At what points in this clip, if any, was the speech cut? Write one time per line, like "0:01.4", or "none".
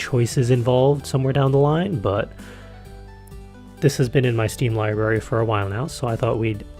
0:03.3

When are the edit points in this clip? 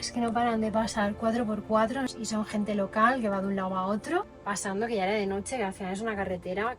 0:02.1
0:04.4

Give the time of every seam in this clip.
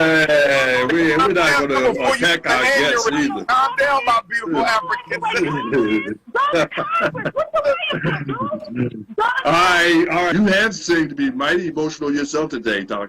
0:10.3

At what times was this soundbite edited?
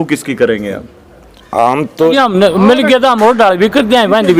0:02.1

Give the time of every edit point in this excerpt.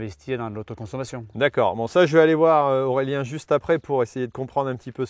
none

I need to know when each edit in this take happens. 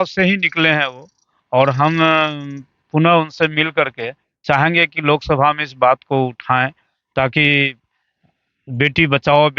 none

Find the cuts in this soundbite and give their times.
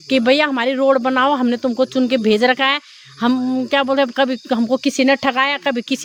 none

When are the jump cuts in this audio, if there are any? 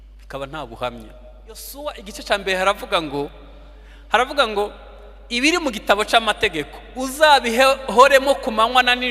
0:01.7

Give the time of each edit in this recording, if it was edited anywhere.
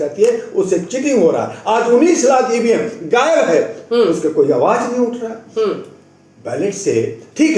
none

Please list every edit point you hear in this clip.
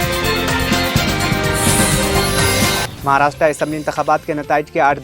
0:02.9

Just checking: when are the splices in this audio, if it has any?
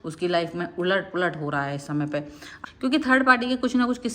0:02.5

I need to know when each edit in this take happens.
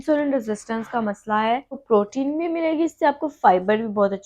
0:01.7

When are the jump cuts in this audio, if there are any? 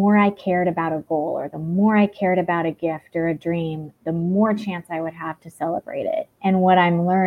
0:06.3

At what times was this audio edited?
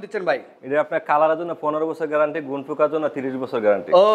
none

